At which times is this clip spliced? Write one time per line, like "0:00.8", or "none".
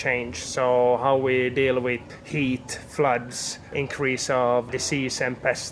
0:02.0
0:03.7
0:04.7

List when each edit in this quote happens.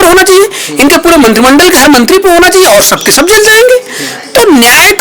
none

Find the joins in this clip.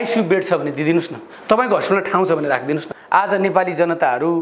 0:02.9

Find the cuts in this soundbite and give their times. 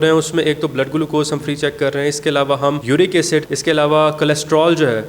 0:02.8
0:03.5

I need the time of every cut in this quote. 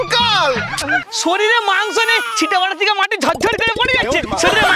0:01.1

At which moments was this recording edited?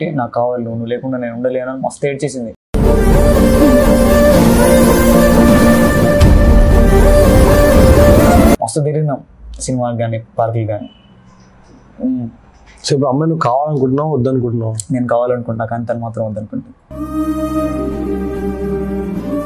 0:08.6

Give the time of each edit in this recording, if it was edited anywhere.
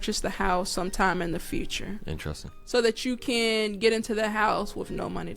0:02.5

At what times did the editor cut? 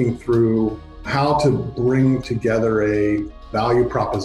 0:01.1
0:03.4

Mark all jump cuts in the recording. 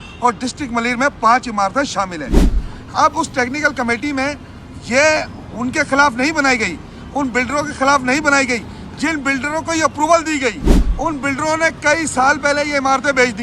0:02.5

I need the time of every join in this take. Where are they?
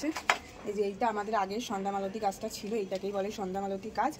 none

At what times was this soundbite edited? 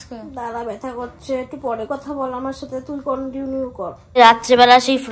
0:04.0

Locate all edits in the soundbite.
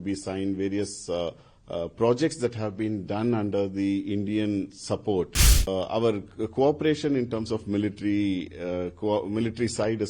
0:05.5

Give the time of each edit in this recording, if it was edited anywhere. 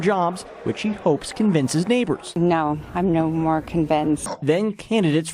0:04.3

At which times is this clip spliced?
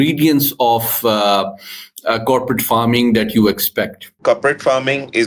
0:04.0

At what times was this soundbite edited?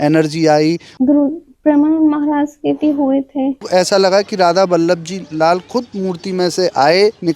0:00.9
0:03.7

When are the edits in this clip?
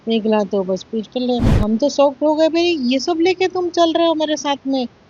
0:01.5

